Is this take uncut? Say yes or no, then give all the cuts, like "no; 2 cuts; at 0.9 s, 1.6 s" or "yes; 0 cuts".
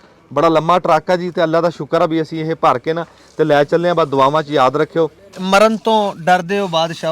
no; 1 cut; at 5.3 s